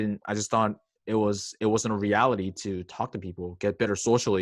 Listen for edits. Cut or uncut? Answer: uncut